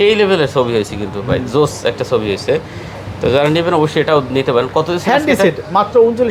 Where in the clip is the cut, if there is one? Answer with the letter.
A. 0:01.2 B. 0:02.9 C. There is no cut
C